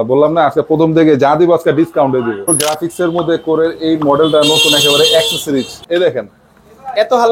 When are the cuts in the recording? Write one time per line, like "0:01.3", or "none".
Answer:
0:02.5
0:05.8